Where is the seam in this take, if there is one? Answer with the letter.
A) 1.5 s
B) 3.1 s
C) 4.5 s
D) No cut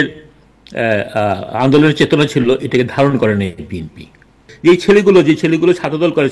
C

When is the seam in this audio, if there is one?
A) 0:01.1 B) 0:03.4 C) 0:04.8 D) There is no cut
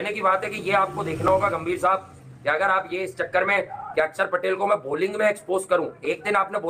D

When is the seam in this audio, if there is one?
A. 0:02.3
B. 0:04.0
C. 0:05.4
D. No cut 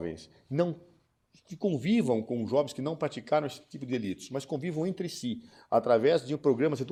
D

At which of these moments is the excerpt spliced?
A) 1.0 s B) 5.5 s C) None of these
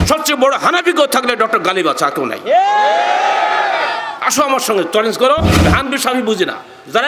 B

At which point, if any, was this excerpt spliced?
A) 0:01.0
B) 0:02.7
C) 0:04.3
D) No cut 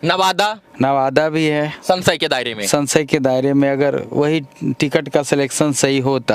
D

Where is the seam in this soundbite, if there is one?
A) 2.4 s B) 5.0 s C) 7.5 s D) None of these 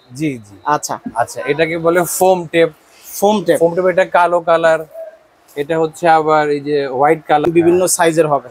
C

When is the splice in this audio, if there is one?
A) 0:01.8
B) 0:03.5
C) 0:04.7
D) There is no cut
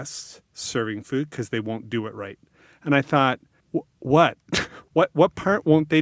B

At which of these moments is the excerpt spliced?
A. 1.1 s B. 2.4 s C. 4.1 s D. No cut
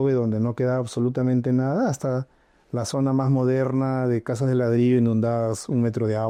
D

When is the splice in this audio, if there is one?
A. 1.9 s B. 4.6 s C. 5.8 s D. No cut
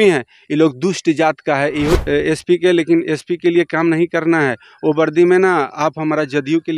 A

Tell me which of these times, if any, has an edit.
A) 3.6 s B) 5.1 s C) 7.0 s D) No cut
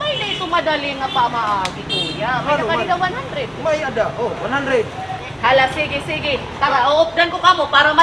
B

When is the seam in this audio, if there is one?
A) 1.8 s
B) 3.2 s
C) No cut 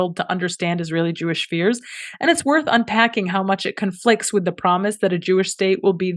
C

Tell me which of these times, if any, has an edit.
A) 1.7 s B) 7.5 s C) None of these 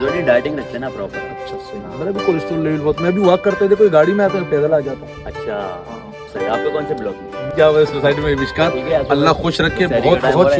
B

